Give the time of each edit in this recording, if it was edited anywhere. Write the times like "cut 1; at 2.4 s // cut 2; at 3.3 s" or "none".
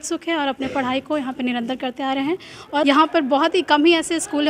cut 1; at 2.8 s

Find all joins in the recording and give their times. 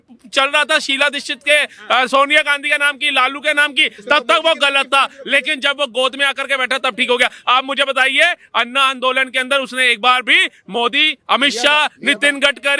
none

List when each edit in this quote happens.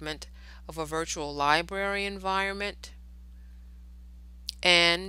cut 1; at 2.5 s

